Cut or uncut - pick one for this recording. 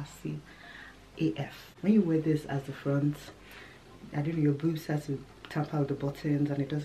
cut